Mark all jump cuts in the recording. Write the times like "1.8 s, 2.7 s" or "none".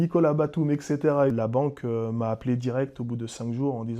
1.3 s